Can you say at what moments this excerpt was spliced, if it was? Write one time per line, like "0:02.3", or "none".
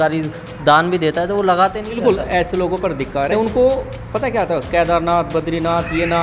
0:02.0
0:03.3